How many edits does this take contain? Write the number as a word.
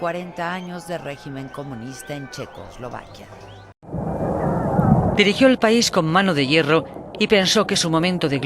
one